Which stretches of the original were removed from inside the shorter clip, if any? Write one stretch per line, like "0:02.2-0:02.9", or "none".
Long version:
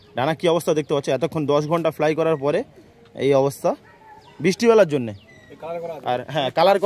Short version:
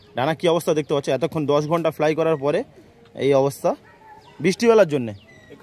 none